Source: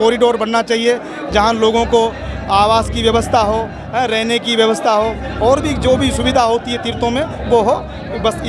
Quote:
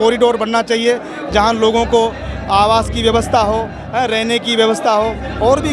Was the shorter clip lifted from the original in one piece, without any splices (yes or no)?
yes